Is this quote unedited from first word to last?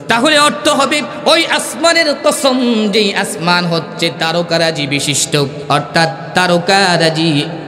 no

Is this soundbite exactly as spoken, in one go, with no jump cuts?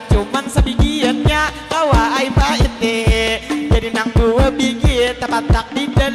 yes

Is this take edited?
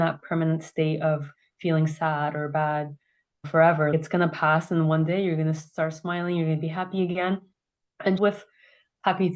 no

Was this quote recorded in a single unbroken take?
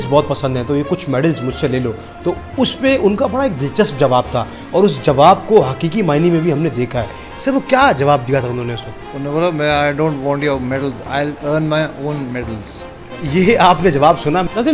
yes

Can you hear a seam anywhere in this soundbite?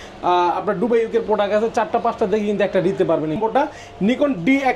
yes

